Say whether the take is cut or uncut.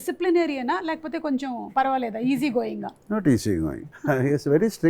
cut